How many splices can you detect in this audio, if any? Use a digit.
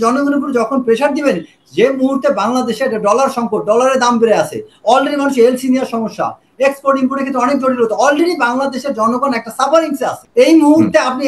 1